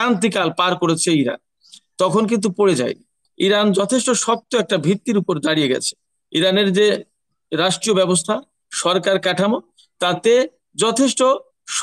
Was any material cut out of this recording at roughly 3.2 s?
yes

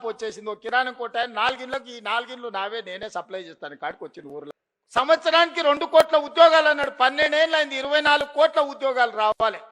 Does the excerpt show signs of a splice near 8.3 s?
no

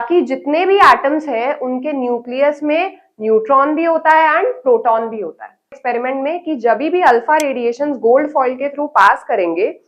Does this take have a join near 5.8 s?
yes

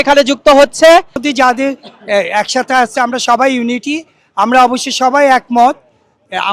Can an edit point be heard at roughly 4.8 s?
no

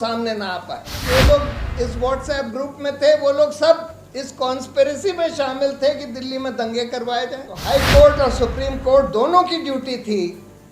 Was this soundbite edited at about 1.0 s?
yes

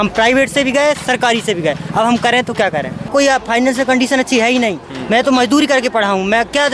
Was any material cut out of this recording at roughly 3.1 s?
yes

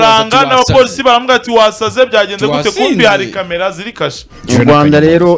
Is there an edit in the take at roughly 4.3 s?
yes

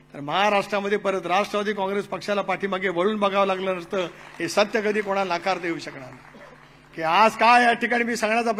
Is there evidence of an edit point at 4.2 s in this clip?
no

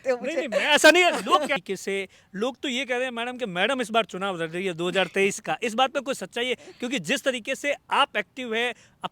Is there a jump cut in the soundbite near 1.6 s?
yes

